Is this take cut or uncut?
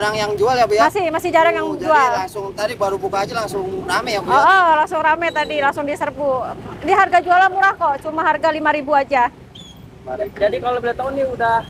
uncut